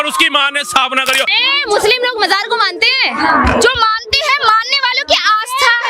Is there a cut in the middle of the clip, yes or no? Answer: yes